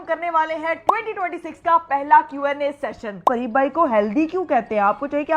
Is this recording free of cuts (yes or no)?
no